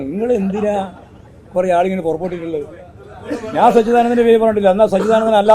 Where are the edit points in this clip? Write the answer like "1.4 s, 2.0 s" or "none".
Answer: none